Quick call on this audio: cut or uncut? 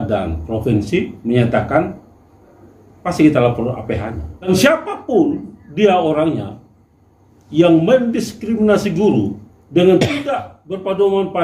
cut